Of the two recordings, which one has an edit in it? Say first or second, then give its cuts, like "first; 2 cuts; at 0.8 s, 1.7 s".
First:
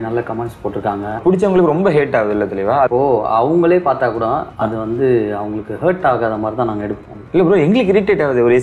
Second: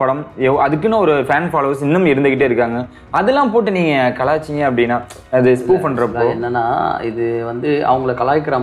first; 3 cuts; at 1.2 s, 2.9 s, 7.1 s